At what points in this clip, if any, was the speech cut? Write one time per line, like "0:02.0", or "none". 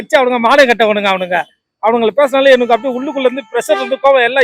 none